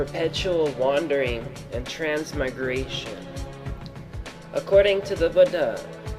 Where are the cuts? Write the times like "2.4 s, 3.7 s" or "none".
3.1 s